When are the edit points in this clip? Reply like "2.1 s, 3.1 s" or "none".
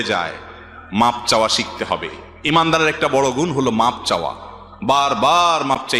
none